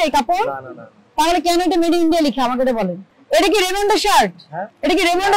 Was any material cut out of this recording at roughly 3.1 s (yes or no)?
yes